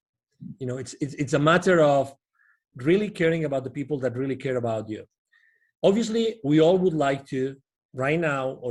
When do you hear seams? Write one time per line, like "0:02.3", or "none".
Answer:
none